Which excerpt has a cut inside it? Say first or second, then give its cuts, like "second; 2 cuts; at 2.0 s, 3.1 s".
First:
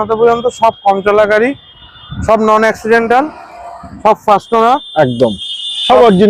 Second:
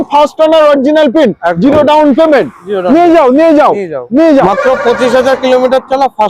second; 1 cut; at 4.4 s